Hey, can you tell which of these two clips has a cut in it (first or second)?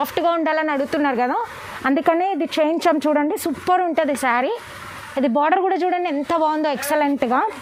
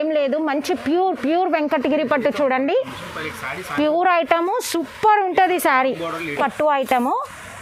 second